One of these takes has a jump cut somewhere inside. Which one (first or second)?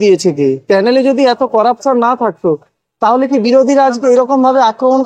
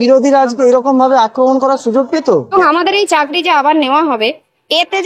second